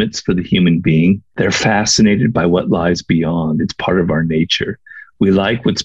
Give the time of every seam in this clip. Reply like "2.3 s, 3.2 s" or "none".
none